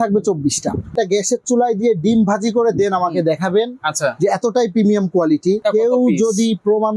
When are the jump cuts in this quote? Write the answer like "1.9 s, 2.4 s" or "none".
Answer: 1.0 s, 5.6 s